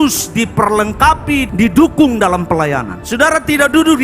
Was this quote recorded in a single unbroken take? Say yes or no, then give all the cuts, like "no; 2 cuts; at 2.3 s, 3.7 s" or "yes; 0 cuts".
no; 1 cut; at 1.5 s